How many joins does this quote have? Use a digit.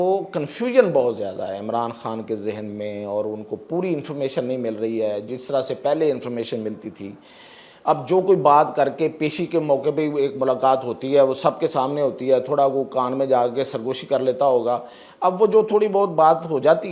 0